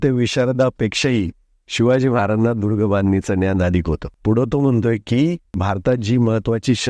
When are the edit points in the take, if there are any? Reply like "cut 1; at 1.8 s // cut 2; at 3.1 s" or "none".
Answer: cut 1; at 0.8 s // cut 2; at 4.1 s // cut 3; at 5.6 s